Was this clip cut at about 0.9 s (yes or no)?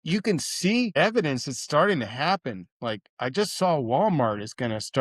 yes